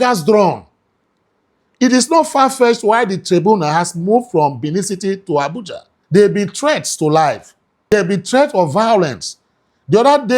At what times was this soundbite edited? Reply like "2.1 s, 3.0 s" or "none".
5.9 s, 7.9 s